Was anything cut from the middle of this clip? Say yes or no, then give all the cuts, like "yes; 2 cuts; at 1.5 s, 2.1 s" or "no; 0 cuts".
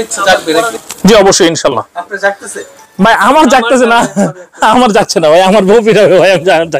no; 0 cuts